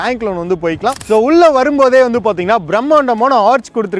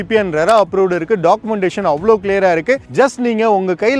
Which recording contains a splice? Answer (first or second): first